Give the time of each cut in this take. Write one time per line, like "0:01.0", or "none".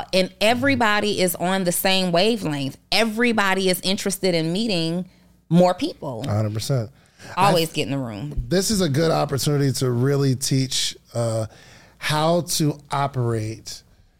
none